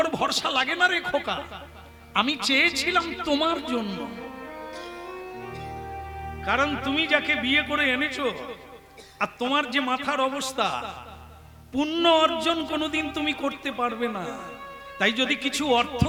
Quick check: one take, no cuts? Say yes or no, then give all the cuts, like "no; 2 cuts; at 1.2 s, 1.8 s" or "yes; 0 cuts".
yes; 0 cuts